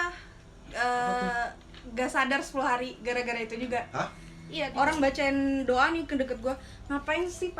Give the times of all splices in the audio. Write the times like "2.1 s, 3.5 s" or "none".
4.6 s